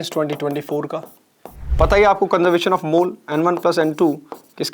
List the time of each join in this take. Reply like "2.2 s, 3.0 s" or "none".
1.7 s